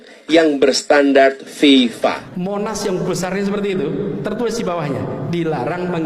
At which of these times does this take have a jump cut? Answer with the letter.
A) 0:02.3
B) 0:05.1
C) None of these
A